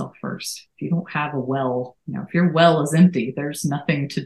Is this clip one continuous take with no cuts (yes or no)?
no